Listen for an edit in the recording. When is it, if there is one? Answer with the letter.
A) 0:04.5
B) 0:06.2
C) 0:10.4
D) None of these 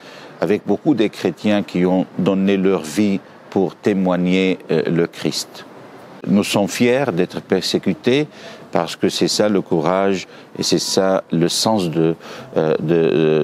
B